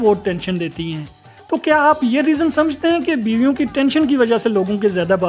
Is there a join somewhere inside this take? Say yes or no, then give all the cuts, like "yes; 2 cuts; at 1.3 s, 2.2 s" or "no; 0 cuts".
no; 0 cuts